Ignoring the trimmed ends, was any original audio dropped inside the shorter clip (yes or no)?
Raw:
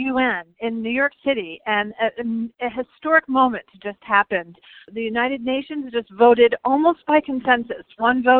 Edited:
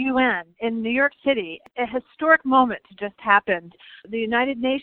yes